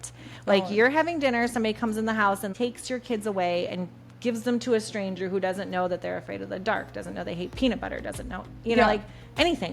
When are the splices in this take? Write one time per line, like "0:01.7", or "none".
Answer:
0:02.5